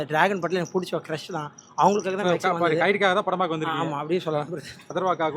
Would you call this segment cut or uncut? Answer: uncut